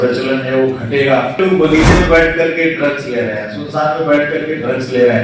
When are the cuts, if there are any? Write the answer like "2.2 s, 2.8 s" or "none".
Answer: 1.4 s